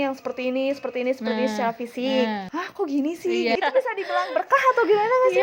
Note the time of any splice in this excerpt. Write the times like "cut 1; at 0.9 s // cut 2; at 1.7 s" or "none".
cut 1; at 2.5 s // cut 2; at 3.6 s